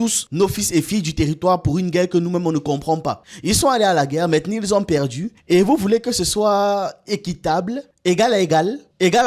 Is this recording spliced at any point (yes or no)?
no